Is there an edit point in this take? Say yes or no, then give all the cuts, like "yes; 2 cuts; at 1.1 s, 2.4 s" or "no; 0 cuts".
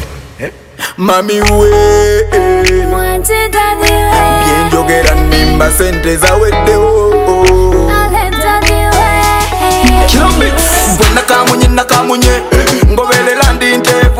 no; 0 cuts